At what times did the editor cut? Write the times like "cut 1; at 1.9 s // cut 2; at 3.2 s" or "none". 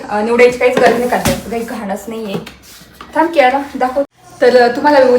cut 1; at 4.1 s